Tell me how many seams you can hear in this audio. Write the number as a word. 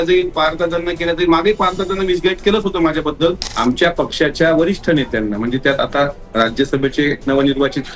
one